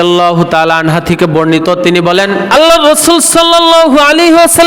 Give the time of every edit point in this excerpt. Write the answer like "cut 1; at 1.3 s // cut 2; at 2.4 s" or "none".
cut 1; at 2.5 s